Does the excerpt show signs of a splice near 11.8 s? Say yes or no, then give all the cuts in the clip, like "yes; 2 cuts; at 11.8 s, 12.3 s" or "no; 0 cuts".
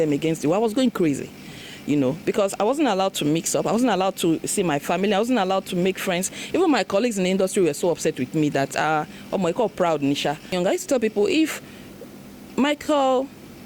no; 1 cut; at 10.5 s